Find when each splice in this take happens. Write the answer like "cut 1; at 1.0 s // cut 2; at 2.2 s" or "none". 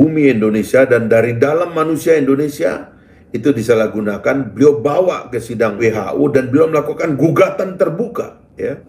cut 1; at 5.8 s